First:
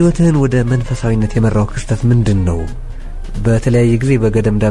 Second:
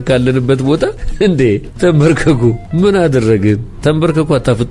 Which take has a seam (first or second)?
second